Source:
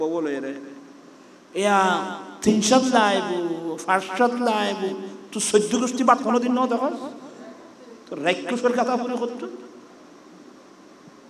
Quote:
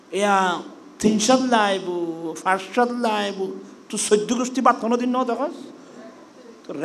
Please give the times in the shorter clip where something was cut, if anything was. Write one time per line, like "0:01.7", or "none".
none

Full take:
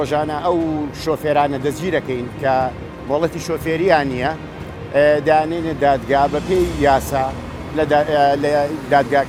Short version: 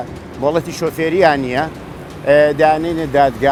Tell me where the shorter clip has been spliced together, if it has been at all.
none

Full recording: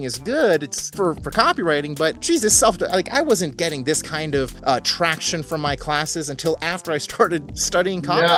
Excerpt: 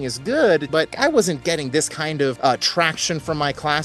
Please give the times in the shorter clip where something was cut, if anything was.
0:00.9
0:02.4

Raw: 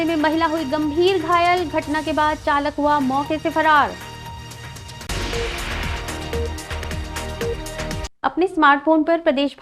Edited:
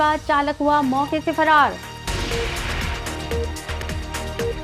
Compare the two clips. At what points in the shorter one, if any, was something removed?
0:02.0

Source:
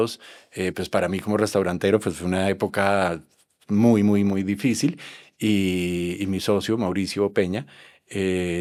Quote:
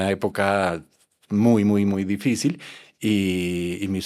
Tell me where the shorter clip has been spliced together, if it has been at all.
none

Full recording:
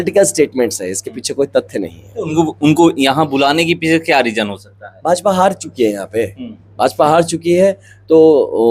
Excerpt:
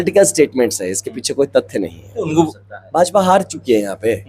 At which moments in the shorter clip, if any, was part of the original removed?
0:02.5

